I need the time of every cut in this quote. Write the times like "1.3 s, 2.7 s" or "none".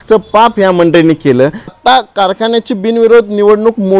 1.7 s